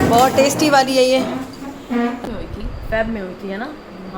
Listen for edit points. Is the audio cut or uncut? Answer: cut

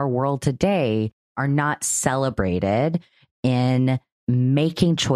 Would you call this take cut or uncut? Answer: cut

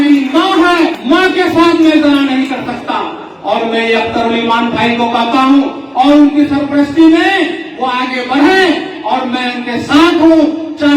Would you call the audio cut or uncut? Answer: cut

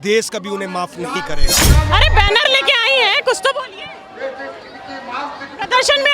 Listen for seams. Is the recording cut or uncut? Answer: cut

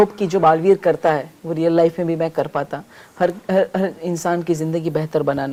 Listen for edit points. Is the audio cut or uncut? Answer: uncut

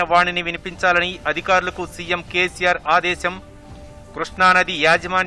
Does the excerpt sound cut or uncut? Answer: uncut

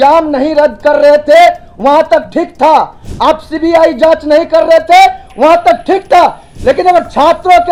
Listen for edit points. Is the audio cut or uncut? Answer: uncut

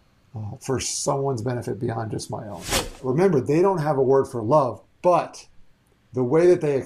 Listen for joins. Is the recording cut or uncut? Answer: cut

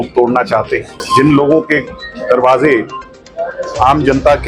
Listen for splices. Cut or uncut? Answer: cut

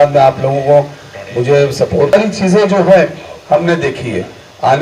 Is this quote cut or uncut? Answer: uncut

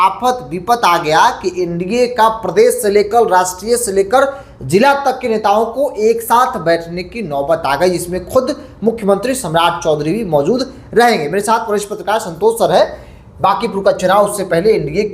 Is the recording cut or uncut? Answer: uncut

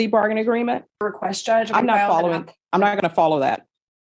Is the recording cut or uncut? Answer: cut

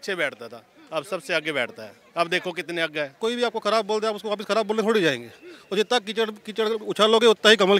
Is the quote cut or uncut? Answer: cut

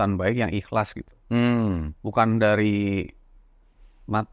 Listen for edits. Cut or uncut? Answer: uncut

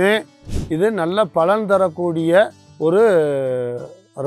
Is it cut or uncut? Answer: uncut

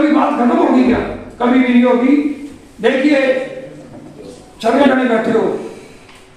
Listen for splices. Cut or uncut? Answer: cut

